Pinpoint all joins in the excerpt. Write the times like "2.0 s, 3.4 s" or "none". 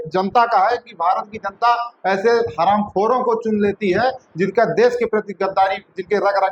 none

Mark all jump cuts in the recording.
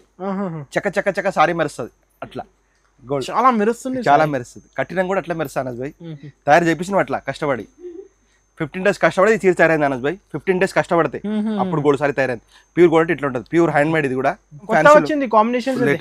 14.7 s

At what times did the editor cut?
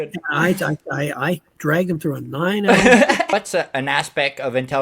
3.3 s

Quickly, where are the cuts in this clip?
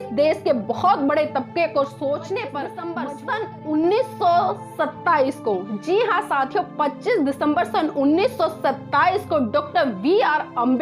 2.8 s

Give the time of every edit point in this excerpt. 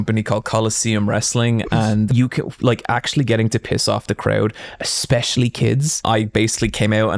2.1 s, 6.0 s

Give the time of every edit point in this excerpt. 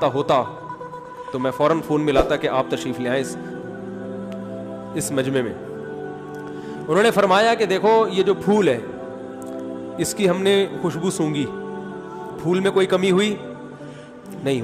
3.3 s, 4.5 s

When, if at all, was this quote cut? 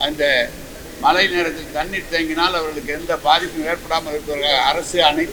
none

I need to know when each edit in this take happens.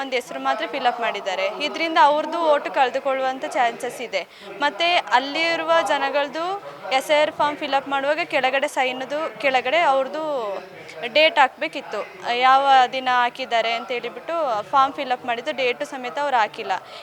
none

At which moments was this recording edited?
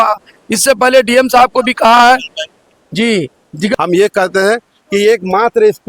3.7 s

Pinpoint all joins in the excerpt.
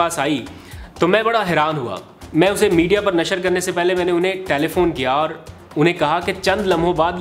none

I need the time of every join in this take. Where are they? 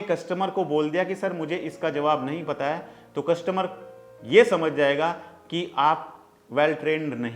none

